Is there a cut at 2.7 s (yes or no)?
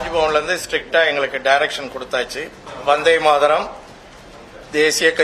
yes